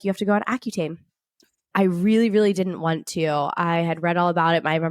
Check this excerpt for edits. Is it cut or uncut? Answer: cut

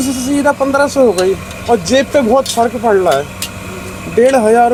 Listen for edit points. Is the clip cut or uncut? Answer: uncut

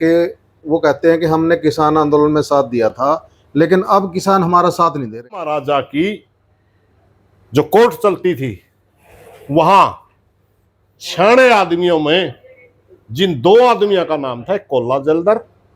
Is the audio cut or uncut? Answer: cut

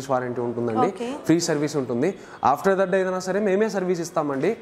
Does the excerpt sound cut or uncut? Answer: uncut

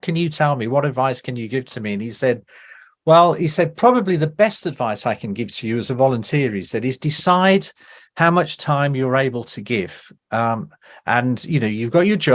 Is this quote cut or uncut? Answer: uncut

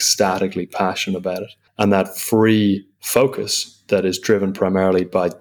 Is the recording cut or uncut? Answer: cut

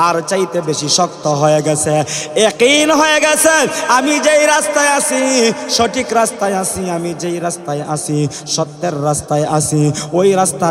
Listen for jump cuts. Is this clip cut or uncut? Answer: uncut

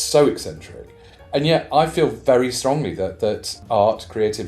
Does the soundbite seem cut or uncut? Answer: cut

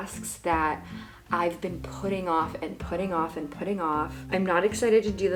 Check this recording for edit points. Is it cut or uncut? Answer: uncut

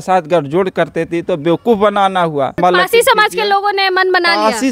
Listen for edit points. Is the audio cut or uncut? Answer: cut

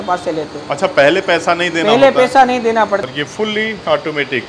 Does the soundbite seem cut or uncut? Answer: cut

